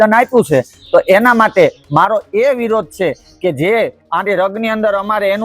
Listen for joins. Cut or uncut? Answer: cut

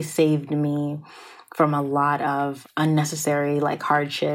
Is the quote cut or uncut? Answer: cut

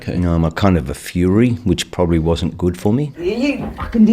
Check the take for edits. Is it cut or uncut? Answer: uncut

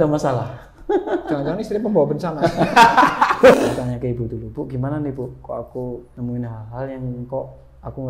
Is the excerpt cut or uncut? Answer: cut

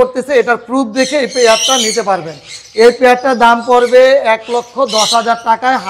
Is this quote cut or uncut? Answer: uncut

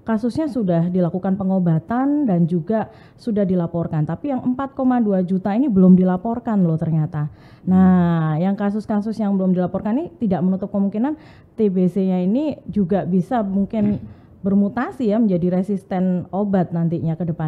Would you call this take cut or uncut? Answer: uncut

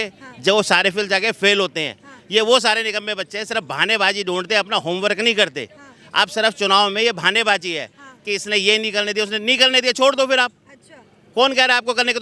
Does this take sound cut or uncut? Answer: uncut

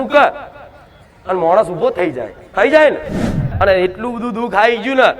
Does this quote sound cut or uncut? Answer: cut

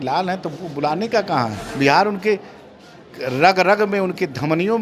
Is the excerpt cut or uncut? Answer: cut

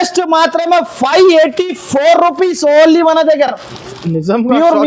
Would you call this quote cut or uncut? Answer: uncut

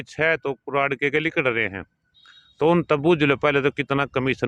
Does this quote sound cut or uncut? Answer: uncut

